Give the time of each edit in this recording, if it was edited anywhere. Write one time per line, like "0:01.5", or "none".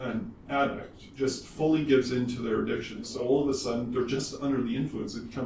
0:01.1
0:03.1